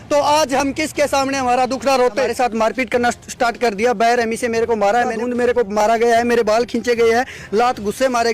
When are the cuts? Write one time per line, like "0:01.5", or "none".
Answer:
0:02.3
0:05.2